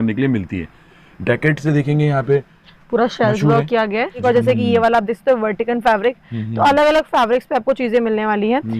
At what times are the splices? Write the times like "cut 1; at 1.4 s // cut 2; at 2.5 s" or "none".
cut 1; at 4.2 s